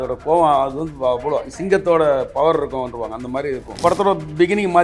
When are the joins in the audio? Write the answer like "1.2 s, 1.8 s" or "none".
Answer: 3.7 s